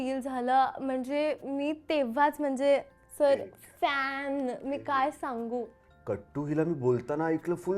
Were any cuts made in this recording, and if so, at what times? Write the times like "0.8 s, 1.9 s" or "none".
5.8 s